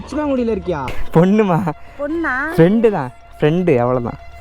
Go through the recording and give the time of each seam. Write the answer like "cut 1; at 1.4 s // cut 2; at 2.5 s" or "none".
cut 1; at 1.0 s